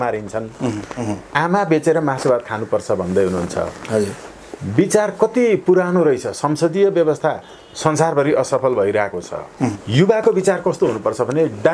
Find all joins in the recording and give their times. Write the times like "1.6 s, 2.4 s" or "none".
1.0 s, 9.8 s